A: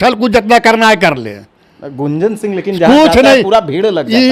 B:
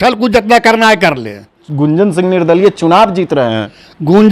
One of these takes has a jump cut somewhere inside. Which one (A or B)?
B